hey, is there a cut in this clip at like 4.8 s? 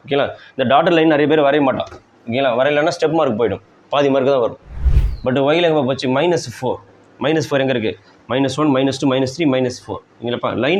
yes; 1 cut; at 4.8 s

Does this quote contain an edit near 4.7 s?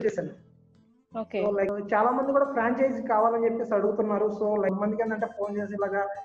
yes; 2 cuts; at 1.7 s, 4.7 s

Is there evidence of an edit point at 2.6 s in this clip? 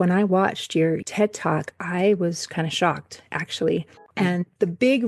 no; 2 cuts; at 1.0 s, 4.0 s

